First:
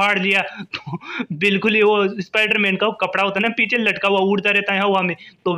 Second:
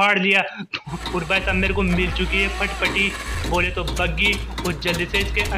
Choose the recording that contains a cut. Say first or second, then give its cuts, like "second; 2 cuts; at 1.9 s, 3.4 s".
second; 1 cut; at 0.9 s